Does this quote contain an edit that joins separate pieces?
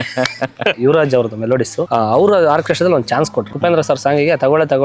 yes; 3 cuts; at 0.8 s, 1.8 s, 3.5 s

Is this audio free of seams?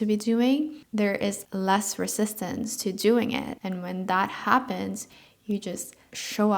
no; 1 cut; at 3.5 s

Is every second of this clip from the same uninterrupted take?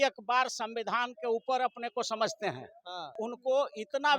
no; 1 cut; at 3.2 s

